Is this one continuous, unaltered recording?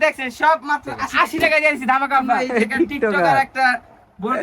no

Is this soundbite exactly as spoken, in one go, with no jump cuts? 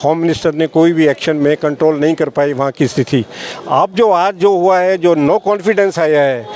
yes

